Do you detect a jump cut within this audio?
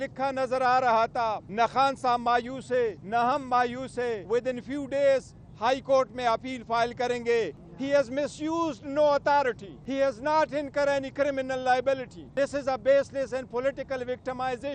yes; 6 cuts; at 1.4 s, 3.0 s, 4.2 s, 7.6 s, 9.7 s, 12.2 s

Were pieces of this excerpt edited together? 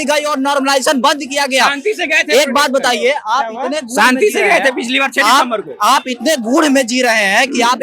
no; 0 cuts

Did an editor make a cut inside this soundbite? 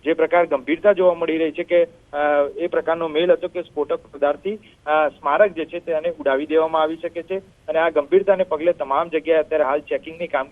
yes; 1 cut; at 5.0 s

